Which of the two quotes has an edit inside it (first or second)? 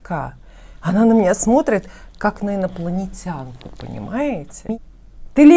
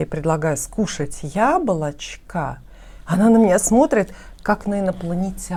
first